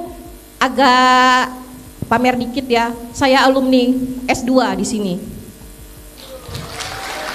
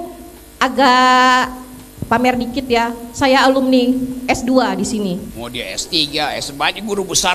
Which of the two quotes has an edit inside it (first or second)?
second